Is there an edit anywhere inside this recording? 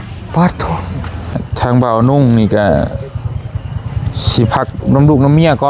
yes; 1 cut; at 1.4 s

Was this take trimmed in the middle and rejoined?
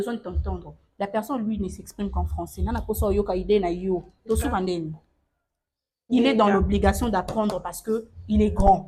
no; 0 cuts

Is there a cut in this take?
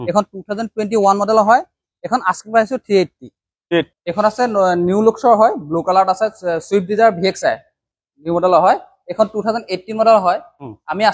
yes; 1 cut; at 4.0 s

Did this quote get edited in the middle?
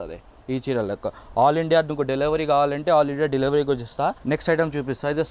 yes; 1 cut; at 4.2 s

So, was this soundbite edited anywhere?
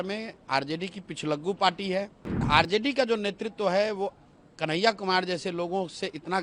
yes; 1 cut; at 2.5 s

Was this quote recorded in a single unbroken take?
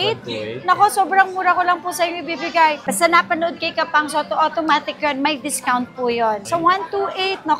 no; 2 cuts; at 2.8 s, 6.4 s

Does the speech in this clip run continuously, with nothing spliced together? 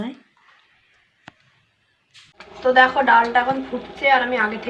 no; 1 cut; at 2.6 s

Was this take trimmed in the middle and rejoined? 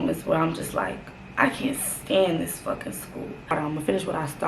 yes; 1 cut; at 3.5 s

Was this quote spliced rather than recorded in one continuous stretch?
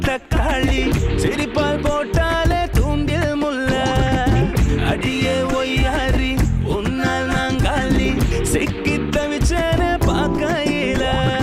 no; 0 cuts

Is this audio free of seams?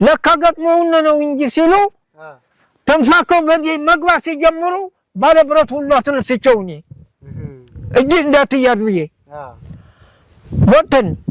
yes; 0 cuts

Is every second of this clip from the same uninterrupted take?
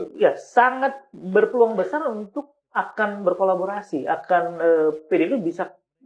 yes; 0 cuts

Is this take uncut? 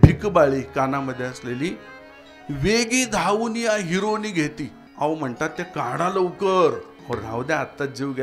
no; 2 cuts; at 4.8 s, 6.9 s

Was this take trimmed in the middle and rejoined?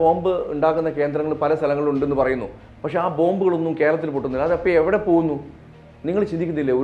no; 0 cuts

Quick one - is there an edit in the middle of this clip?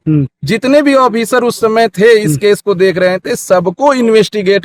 no; 0 cuts

